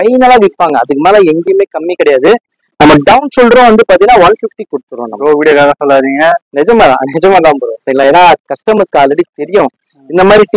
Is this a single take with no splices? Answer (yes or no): yes